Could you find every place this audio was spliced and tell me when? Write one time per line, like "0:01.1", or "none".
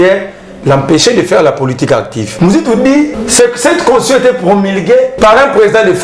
0:02.2
0:03.2
0:05.1